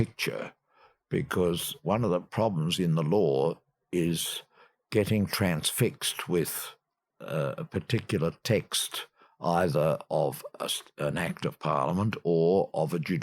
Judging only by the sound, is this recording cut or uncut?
cut